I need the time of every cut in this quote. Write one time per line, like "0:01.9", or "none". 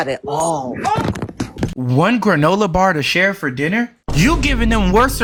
none